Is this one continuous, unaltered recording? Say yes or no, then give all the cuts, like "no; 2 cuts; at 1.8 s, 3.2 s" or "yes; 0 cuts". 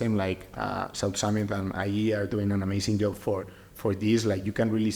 yes; 0 cuts